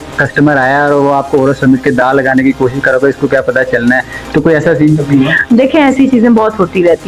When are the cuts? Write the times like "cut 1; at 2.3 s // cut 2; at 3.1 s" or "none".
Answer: none